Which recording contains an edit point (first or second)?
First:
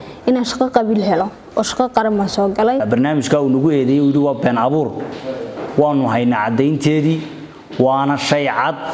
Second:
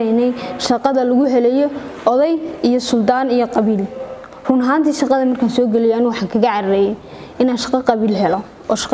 first